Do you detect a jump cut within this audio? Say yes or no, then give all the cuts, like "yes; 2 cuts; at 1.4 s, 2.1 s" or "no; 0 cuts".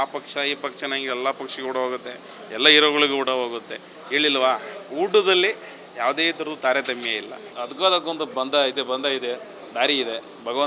yes; 1 cut; at 7.6 s